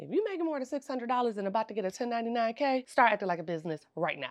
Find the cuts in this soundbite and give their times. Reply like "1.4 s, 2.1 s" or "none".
2.9 s